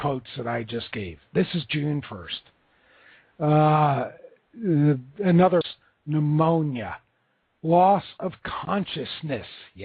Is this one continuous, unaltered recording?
yes; 0 cuts

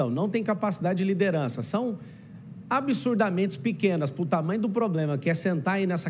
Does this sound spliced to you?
no; 0 cuts

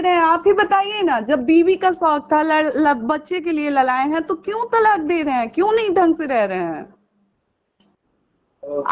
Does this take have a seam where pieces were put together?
no; 0 cuts

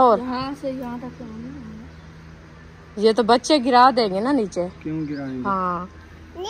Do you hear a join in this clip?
no; 0 cuts

